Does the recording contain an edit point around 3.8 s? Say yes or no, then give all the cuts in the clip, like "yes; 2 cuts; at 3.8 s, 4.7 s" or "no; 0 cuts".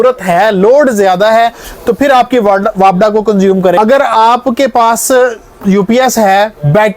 yes; 1 cut; at 3.8 s